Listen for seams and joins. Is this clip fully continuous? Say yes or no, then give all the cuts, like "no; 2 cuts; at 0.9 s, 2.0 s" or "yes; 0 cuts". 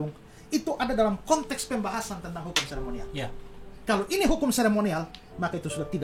yes; 0 cuts